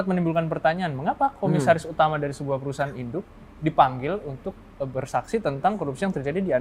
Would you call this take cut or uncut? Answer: uncut